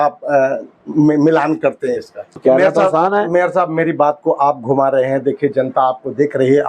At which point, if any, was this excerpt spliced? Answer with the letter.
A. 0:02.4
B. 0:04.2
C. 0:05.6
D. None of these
A